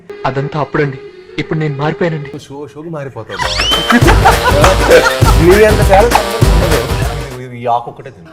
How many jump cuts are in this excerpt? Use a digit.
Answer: 1